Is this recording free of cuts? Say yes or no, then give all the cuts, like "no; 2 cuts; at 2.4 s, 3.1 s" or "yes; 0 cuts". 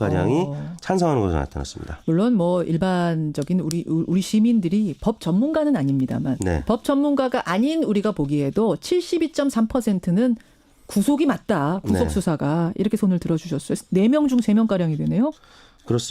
no; 1 cut; at 14.8 s